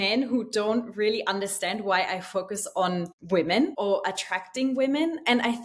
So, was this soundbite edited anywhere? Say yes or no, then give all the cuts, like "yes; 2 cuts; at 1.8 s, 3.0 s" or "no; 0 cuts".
yes; 2 cuts; at 3.2 s, 3.7 s